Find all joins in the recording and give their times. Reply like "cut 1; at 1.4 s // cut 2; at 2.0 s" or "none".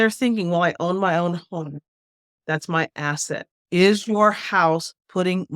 cut 1; at 3.5 s